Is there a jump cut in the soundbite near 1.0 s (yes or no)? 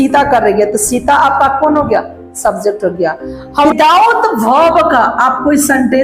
no